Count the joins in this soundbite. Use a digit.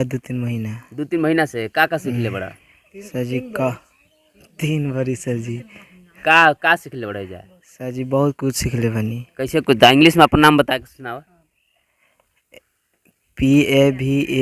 0